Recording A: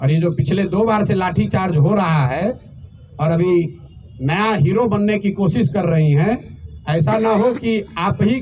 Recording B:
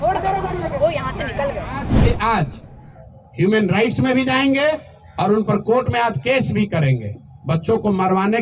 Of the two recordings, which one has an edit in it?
B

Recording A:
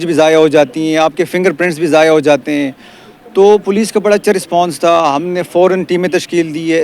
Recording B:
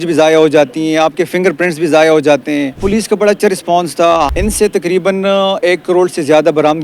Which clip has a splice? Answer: B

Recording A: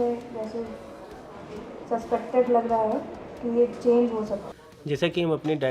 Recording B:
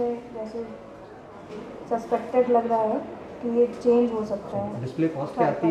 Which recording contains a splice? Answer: A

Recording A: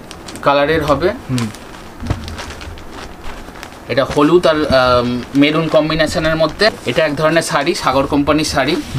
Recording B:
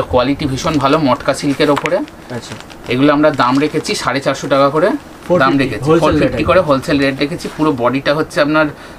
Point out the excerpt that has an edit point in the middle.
A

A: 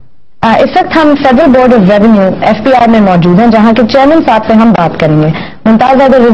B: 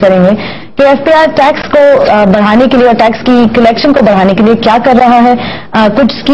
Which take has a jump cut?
A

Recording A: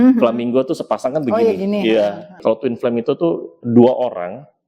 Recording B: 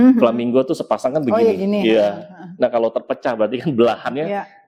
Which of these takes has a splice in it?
A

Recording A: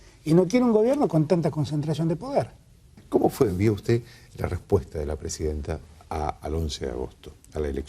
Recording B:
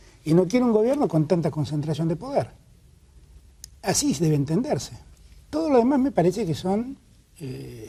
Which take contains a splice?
A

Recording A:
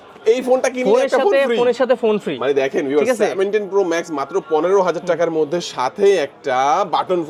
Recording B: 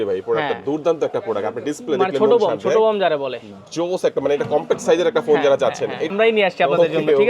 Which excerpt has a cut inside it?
B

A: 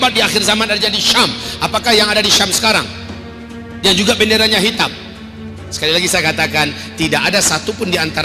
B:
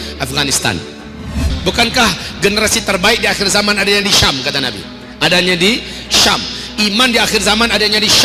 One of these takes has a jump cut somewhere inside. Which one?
B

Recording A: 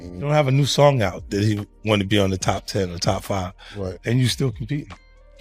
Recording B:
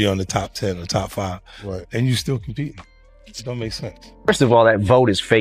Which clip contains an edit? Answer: B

